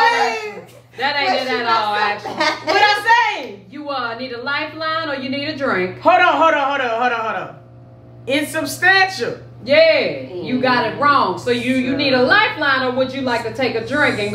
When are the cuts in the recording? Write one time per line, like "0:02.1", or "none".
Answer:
none